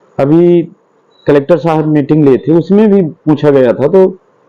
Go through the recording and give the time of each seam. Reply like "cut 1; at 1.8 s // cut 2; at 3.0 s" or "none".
none

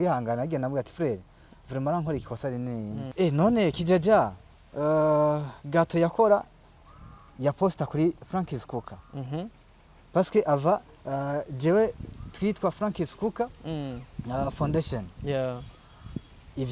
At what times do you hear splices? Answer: cut 1; at 3.0 s

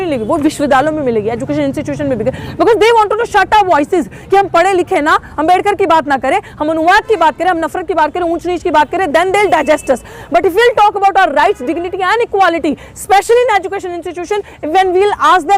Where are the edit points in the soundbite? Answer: none

